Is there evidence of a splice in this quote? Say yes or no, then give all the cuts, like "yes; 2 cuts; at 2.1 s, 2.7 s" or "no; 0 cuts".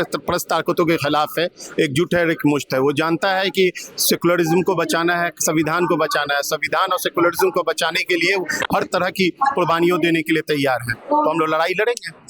no; 0 cuts